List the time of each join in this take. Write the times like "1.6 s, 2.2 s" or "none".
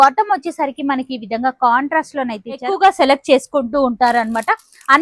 2.7 s